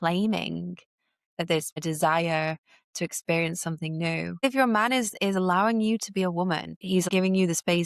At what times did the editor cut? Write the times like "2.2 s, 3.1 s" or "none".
1.8 s, 4.4 s, 7.1 s